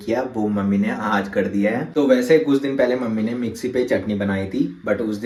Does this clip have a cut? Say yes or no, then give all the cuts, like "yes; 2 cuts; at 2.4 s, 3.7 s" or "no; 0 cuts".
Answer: no; 0 cuts